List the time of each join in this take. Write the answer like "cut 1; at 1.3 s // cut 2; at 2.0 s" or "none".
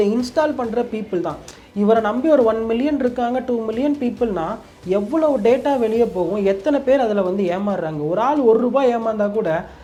none